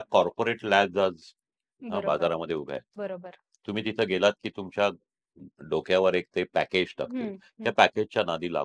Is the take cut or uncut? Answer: uncut